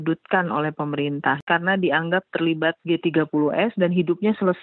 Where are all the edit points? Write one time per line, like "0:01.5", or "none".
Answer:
0:01.4